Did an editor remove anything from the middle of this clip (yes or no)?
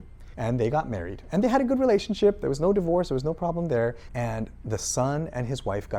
yes